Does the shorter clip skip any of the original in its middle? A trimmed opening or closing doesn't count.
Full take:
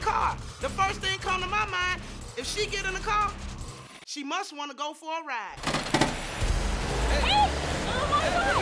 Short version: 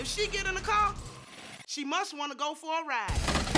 no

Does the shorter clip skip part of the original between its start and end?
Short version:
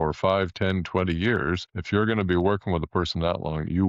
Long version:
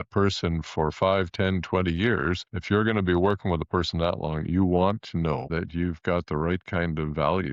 no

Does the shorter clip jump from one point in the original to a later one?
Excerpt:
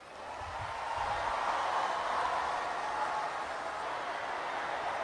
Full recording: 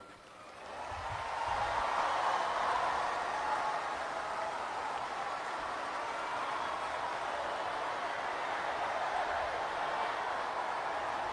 yes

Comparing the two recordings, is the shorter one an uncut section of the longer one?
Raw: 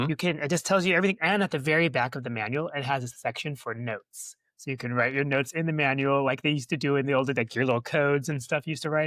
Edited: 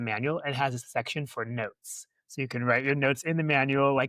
yes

